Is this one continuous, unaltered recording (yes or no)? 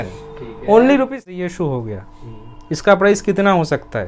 no